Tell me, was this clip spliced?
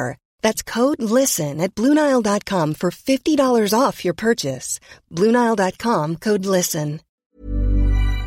yes; 1 cut; at 7.2 s

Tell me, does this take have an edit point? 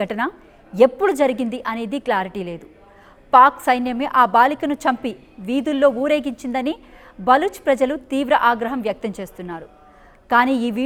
no; 0 cuts

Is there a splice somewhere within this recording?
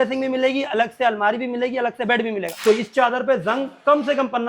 yes; 1 cut; at 2.5 s

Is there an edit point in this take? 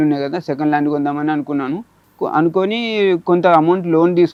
no; 0 cuts

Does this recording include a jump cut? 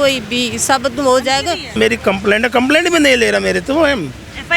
yes; 1 cut; at 1.8 s

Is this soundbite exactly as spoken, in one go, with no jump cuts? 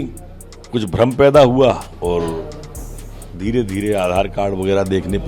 no; 1 cut; at 1.9 s

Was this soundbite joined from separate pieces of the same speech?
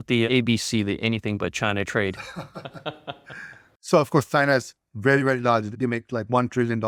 no; 0 cuts

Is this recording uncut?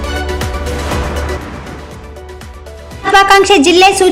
no; 1 cut; at 3.0 s

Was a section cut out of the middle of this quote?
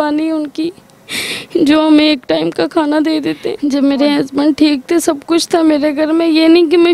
yes; 1 cut; at 3.5 s

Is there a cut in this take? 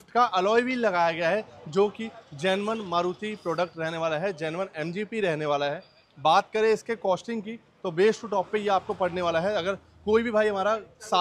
no; 0 cuts

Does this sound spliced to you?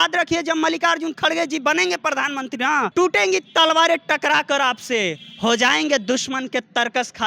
yes; 1 cut; at 2.9 s

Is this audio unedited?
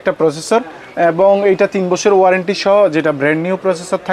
yes; 0 cuts

